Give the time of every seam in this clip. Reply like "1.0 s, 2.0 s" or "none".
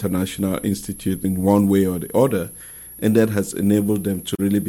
1.2 s